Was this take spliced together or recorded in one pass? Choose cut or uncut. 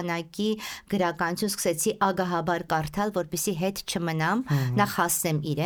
uncut